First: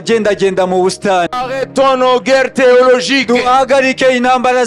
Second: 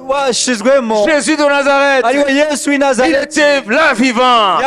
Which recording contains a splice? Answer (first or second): first